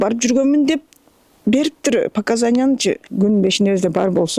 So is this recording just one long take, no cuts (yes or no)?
no